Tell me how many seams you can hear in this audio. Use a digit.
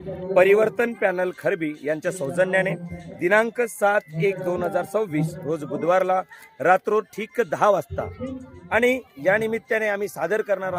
0